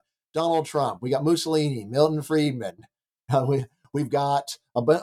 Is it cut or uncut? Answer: uncut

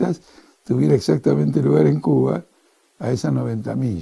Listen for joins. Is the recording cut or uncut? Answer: cut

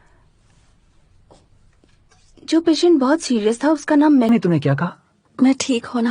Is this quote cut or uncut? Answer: cut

